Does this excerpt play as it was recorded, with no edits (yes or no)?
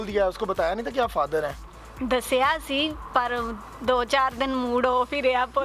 yes